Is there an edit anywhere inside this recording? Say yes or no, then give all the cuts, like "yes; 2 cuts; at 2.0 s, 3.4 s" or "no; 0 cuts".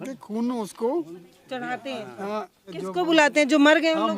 yes; 1 cut; at 2.8 s